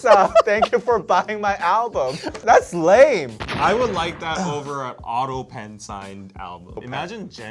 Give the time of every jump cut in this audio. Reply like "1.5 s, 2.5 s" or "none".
2.4 s

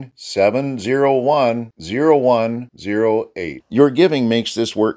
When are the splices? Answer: none

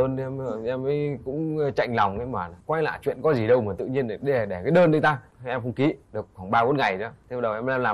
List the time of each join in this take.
none

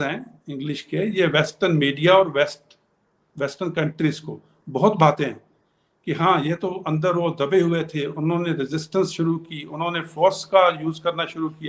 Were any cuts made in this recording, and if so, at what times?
none

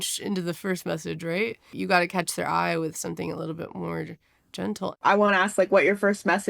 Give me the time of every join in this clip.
1.7 s, 4.9 s

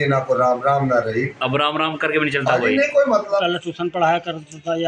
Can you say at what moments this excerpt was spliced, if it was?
3.4 s

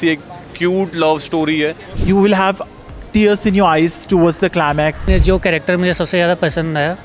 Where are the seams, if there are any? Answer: 1.9 s, 5.1 s

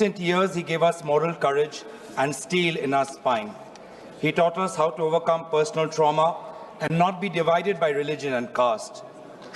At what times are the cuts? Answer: none

